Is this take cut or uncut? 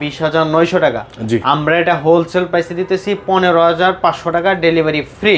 uncut